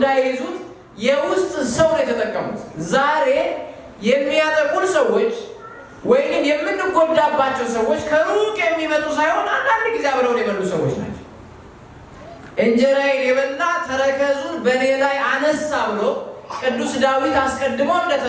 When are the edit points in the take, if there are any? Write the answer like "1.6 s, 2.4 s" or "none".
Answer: none